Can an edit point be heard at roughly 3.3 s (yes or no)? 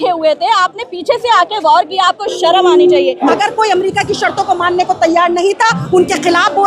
yes